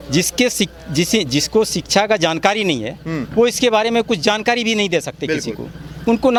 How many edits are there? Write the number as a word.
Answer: zero